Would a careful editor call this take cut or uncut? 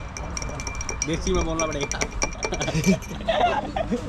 uncut